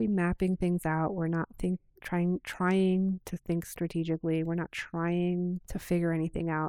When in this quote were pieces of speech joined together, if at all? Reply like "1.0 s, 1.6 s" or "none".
5.7 s